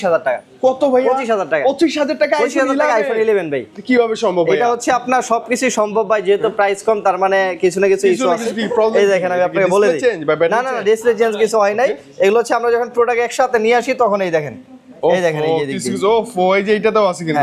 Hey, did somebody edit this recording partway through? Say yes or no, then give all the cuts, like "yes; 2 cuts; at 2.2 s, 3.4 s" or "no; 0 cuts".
no; 0 cuts